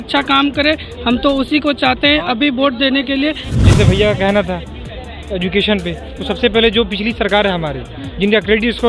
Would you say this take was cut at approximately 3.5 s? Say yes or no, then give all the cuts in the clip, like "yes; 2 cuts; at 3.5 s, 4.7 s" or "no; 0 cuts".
yes; 1 cut; at 3.5 s